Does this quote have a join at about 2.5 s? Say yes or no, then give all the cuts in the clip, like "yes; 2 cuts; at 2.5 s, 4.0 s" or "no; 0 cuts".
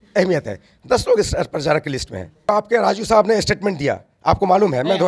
yes; 1 cut; at 2.5 s